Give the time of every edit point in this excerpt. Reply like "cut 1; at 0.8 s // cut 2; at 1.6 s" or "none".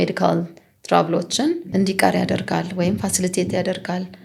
cut 1; at 1.6 s